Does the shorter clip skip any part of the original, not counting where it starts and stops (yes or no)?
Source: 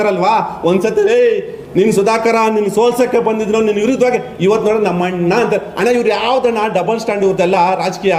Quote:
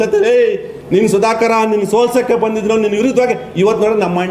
no